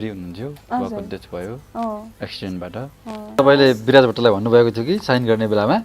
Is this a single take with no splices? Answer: no; 1 cut; at 3.4 s

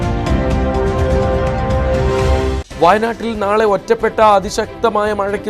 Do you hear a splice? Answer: yes; 1 cut; at 2.7 s

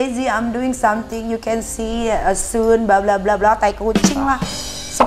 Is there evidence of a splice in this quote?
no; 0 cuts

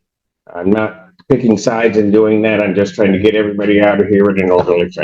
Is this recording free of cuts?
yes; 0 cuts

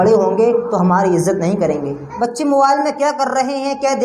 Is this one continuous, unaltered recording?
no; 1 cut; at 2.0 s

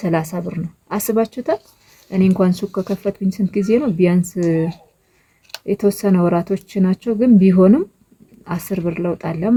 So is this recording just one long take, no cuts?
yes; 0 cuts

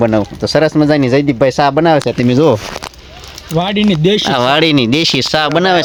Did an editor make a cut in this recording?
no; 0 cuts

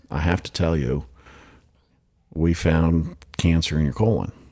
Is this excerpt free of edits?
yes; 0 cuts

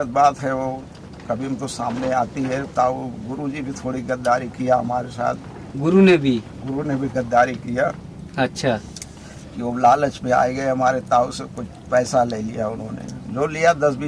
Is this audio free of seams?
yes; 0 cuts

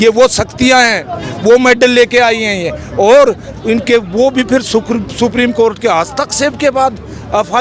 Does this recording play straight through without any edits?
yes; 0 cuts

